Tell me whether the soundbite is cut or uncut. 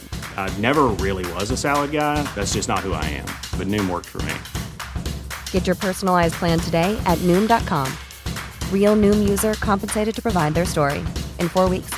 uncut